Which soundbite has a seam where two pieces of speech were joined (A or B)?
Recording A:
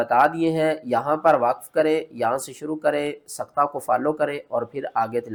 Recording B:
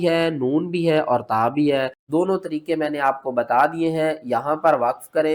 B